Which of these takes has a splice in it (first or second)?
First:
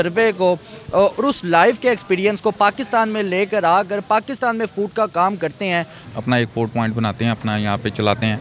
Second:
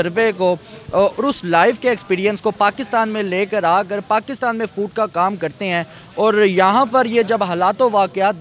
first